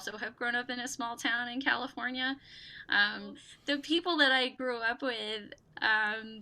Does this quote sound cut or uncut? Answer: cut